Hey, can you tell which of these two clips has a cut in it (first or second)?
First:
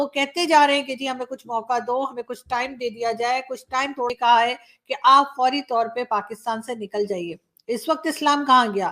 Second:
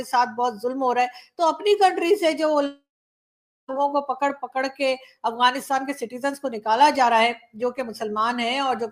first